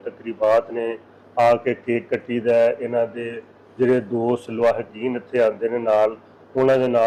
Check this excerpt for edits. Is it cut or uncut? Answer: uncut